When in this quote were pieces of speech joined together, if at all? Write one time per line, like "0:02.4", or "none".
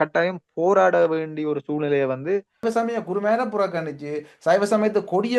0:02.6